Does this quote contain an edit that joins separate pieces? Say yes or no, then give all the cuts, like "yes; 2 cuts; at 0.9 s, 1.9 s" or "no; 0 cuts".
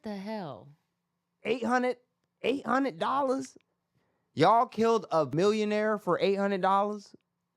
yes; 1 cut; at 5.3 s